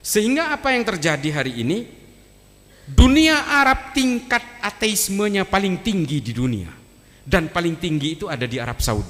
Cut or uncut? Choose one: uncut